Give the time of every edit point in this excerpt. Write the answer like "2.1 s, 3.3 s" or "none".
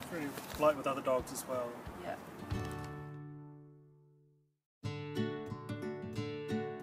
2.3 s